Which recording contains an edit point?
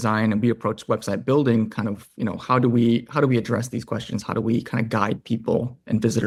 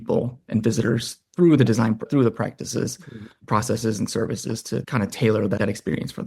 second; 3 cuts; at 2.1 s, 4.9 s, 5.6 s

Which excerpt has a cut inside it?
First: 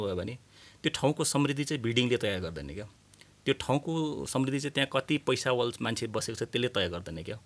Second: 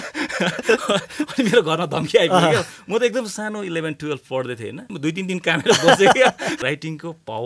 second; 2 cuts; at 4.9 s, 6.6 s

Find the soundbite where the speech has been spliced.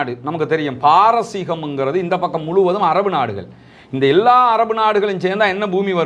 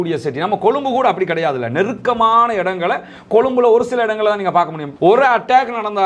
second; 1 cut; at 4.8 s

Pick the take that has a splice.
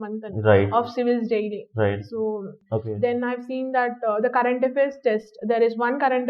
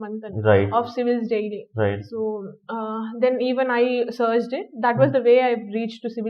first; 1 cut; at 2.5 s

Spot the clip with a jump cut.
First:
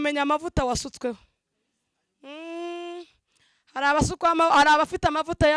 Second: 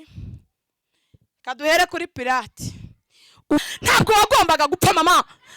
second; 1 cut; at 3.7 s

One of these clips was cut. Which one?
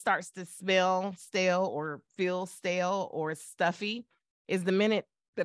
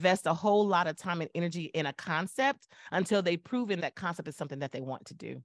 second; 1 cut; at 3.8 s

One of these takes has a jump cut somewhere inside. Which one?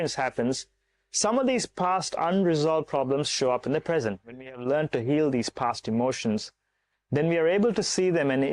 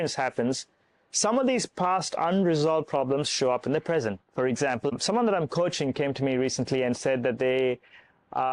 first; 1 cut; at 4.2 s

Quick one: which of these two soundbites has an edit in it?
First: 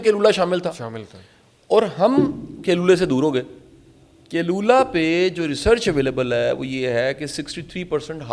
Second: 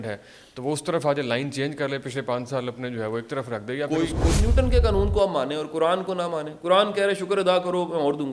second; 1 cut; at 4.3 s

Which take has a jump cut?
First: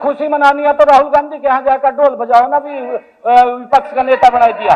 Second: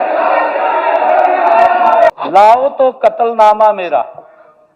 second; 1 cut; at 2.1 s

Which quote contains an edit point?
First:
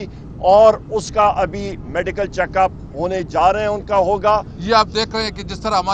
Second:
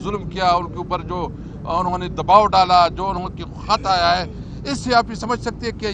first; 1 cut; at 4.5 s

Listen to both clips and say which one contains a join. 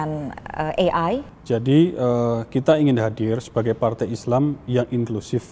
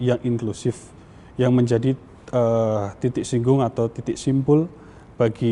first; 1 cut; at 1.3 s

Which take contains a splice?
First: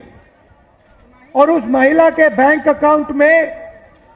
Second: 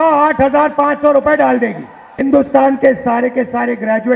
second; 1 cut; at 2.0 s

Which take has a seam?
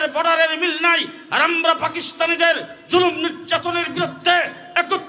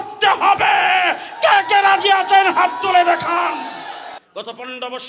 second; 1 cut; at 4.2 s

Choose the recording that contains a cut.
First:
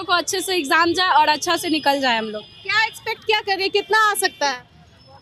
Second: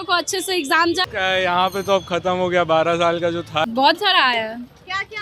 second; 2 cuts; at 1.0 s, 3.6 s

